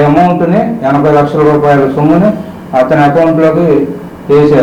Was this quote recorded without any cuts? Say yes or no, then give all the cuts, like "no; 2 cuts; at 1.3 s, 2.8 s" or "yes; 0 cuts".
yes; 0 cuts